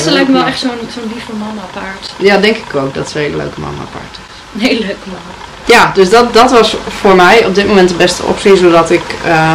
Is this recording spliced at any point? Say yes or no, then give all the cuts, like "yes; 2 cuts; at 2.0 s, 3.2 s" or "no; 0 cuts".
no; 0 cuts